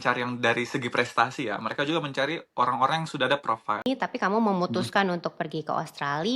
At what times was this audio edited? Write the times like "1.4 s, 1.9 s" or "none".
3.9 s